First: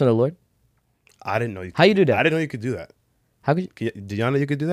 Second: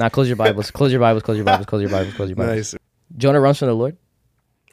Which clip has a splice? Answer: second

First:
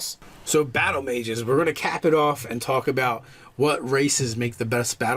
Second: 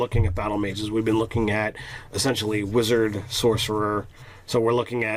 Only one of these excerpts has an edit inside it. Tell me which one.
first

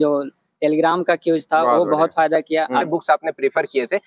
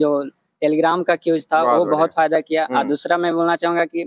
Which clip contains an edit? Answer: first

